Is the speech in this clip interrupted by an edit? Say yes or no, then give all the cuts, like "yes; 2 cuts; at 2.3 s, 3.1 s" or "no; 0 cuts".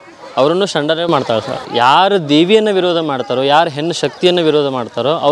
yes; 1 cut; at 1.6 s